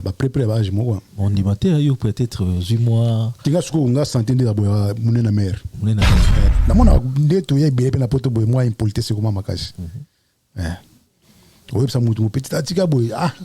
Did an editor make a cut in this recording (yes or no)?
yes